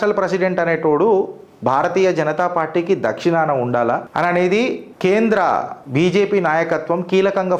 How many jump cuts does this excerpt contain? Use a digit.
3